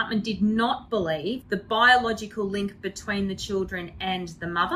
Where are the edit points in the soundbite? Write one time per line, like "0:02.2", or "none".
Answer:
0:01.4